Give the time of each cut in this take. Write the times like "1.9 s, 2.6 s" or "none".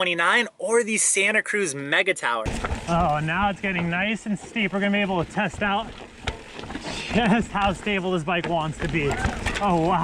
2.4 s